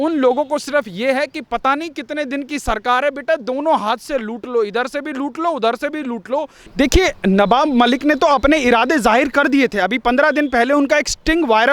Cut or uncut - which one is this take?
cut